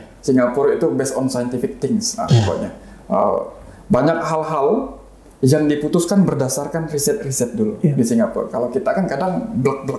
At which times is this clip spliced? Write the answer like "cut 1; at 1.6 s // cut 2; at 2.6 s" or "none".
none